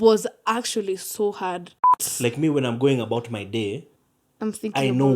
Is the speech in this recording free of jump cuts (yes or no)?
no